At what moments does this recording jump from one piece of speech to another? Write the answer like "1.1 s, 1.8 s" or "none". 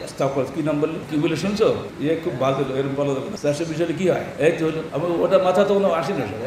1.0 s, 1.9 s, 3.3 s, 4.8 s